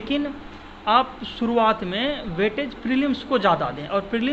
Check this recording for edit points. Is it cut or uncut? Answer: uncut